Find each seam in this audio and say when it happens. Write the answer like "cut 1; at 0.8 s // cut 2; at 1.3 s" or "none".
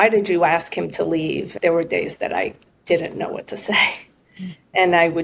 cut 1; at 1.5 s

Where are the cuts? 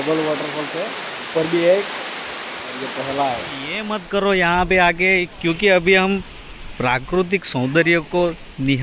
cut 1; at 4.0 s

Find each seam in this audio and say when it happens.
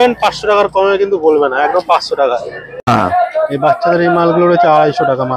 cut 1; at 2.9 s

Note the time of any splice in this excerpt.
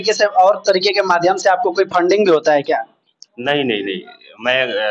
none

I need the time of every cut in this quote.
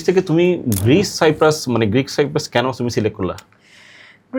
none

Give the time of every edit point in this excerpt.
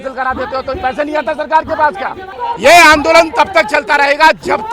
cut 1; at 2.3 s

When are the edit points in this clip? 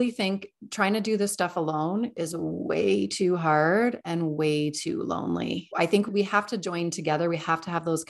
cut 1; at 6.0 s

